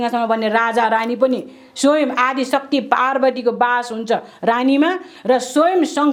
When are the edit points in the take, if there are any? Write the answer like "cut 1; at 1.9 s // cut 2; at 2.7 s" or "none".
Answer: none